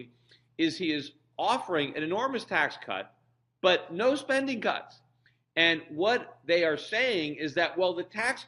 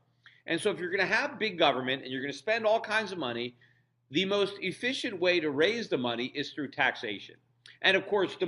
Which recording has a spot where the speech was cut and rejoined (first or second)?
second